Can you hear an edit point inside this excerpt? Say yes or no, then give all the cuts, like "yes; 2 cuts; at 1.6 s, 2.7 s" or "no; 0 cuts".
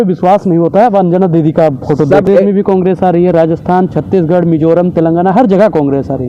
yes; 1 cut; at 2.3 s